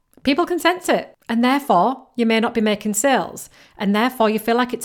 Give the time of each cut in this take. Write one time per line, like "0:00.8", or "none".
0:01.2